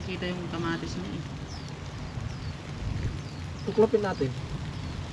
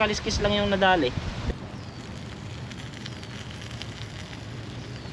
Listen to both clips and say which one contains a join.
second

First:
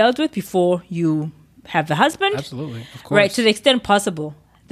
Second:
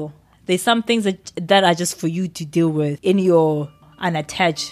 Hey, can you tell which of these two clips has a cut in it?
second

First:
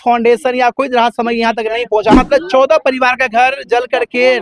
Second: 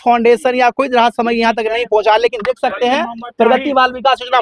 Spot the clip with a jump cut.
first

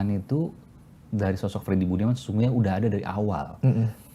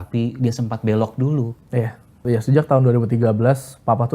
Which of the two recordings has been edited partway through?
second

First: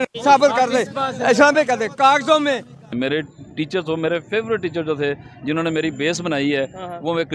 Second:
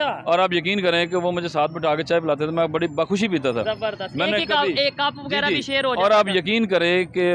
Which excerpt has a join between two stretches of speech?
first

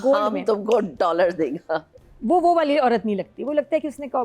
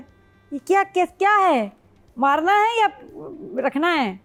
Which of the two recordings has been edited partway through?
first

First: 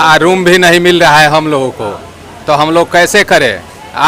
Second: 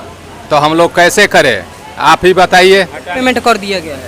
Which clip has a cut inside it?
second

